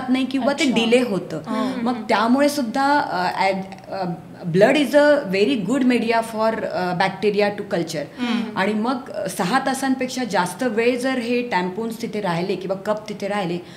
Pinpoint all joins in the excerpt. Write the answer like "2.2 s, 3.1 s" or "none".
none